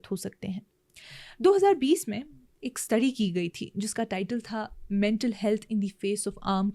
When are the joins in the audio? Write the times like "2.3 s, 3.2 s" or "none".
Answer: none